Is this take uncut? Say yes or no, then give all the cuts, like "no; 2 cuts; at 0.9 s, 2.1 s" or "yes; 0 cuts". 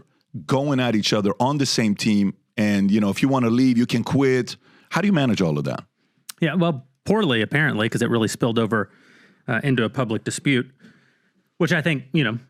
yes; 0 cuts